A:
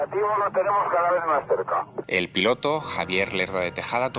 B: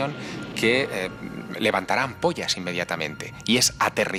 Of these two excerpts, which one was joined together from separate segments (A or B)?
A